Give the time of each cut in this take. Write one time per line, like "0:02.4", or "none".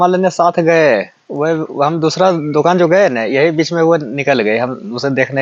none